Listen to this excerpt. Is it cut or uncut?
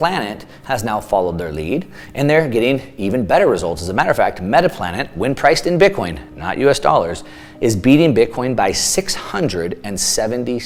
uncut